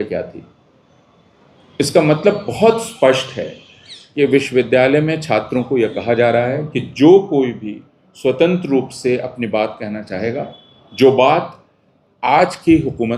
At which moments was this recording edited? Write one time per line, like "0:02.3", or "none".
none